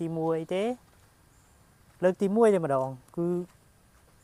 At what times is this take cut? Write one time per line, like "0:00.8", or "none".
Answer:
none